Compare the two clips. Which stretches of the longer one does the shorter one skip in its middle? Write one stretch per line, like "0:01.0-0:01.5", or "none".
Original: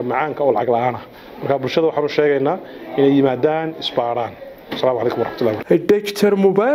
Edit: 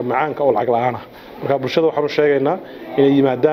none